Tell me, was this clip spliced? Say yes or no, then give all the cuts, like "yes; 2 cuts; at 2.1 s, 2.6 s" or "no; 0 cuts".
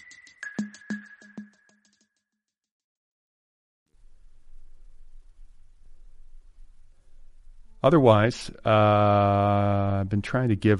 no; 0 cuts